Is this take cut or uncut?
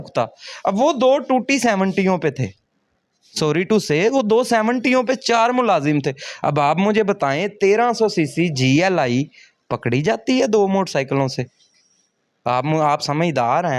uncut